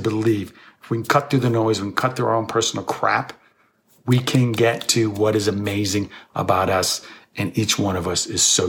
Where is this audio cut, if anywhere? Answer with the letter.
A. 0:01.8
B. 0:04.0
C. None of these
C